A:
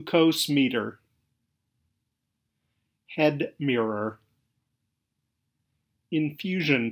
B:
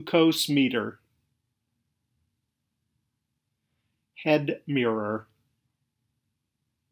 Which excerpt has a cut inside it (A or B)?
A